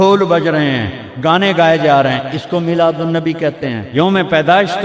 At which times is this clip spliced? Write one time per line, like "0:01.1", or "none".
0:03.8